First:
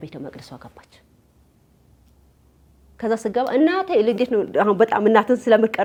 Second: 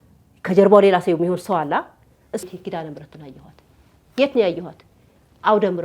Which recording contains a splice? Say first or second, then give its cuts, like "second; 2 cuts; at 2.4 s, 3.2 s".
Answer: second; 1 cut; at 2.4 s